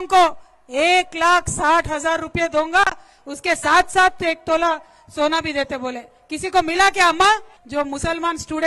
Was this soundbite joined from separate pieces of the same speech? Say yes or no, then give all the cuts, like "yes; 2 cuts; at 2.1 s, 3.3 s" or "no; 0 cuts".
yes; 1 cut; at 7.6 s